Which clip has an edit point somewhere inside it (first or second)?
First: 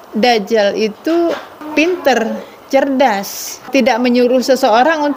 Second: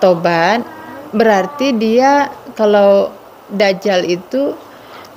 first